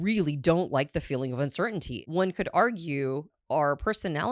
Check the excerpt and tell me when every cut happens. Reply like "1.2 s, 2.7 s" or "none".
1.9 s, 3.3 s